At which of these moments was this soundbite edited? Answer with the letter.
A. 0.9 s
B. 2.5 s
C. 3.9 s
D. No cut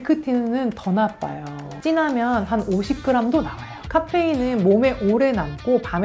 C